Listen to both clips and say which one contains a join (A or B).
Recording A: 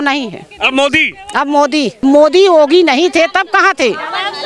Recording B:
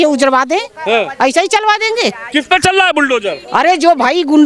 A